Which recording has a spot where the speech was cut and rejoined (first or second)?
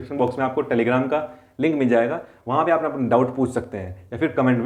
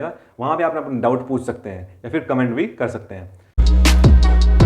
second